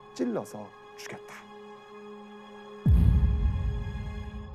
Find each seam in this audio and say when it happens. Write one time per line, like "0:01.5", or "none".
none